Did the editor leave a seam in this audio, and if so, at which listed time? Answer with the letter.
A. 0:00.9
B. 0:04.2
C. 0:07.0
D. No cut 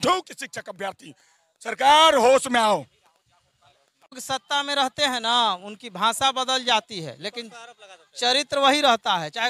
B